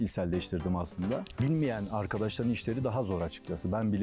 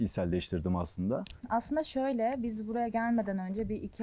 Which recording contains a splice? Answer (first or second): first